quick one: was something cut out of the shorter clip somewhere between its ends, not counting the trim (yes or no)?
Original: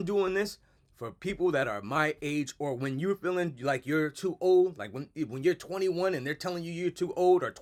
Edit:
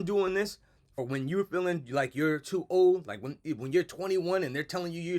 yes